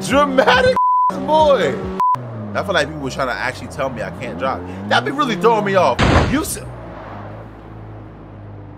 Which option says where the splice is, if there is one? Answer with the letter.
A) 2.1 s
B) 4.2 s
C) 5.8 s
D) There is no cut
A